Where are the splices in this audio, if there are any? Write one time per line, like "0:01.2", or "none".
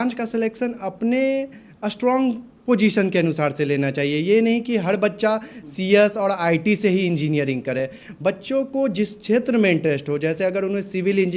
none